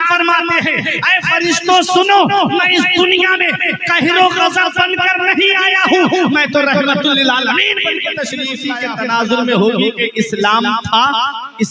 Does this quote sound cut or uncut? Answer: cut